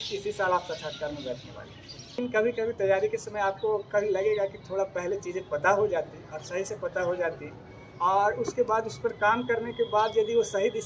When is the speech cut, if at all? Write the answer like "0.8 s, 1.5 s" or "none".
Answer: 2.2 s